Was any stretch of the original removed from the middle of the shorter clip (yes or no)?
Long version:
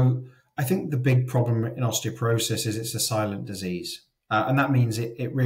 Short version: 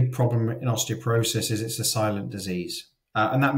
no